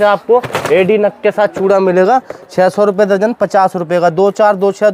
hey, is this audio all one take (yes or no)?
yes